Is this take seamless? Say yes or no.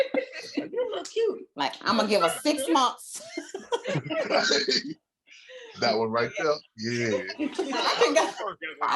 no